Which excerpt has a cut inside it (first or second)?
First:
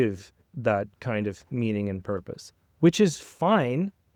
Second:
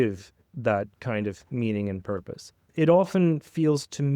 second